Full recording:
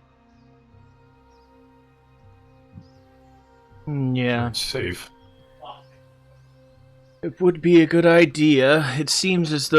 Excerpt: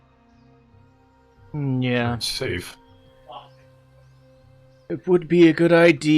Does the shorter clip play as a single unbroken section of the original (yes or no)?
no